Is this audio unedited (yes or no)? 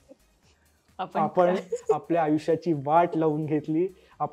yes